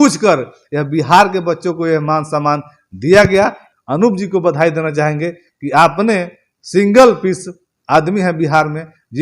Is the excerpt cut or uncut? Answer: cut